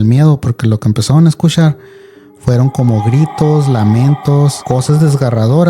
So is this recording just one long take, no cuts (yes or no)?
no